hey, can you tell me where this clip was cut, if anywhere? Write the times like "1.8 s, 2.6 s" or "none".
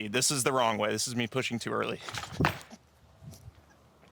2.2 s, 2.8 s

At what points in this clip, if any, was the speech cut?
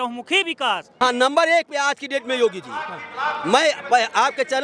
0.9 s

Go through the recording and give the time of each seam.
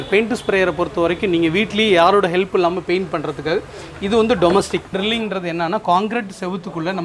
4.9 s

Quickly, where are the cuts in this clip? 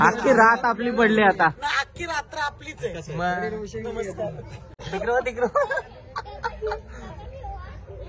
4.8 s

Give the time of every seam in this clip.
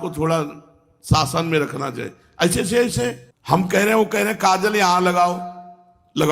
3.3 s

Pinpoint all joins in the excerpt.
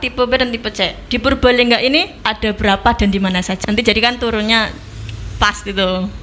2.2 s, 3.5 s

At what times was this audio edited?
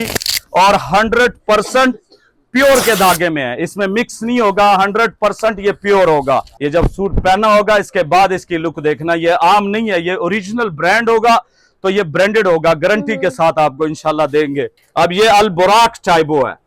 6.5 s, 14.8 s

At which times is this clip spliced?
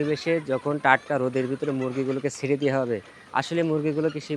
none

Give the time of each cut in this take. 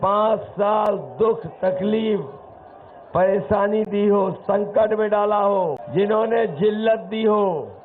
5.8 s

